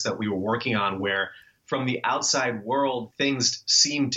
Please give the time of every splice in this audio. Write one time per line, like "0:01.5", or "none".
0:03.1